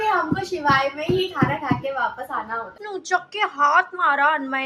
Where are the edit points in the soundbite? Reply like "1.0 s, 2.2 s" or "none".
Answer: 2.8 s